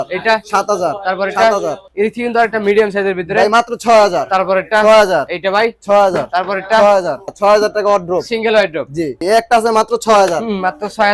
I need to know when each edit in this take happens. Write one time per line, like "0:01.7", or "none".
0:01.8
0:07.3
0:09.2